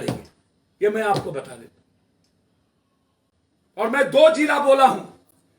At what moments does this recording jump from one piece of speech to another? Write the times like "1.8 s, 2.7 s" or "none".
none